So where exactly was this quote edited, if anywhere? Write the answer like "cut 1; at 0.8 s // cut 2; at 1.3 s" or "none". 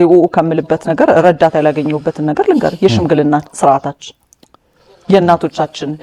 none